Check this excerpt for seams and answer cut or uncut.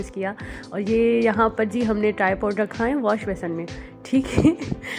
uncut